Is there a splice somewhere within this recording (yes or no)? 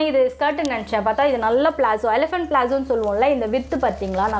no